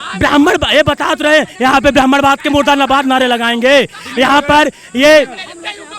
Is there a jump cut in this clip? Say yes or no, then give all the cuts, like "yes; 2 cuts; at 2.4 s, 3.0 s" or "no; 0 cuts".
no; 0 cuts